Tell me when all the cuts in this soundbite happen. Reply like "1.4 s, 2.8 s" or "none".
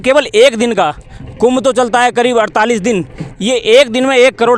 none

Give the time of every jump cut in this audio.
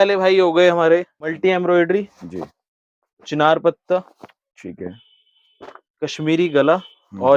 1.3 s

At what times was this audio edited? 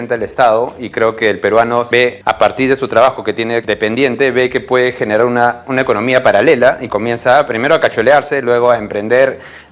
2.0 s, 3.6 s, 5.6 s

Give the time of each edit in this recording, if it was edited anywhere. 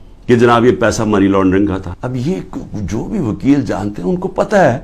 1.9 s

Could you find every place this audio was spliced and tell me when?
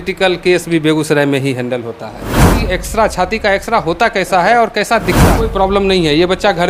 2.6 s, 5.3 s

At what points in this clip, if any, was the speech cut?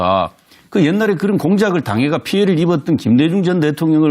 1.4 s

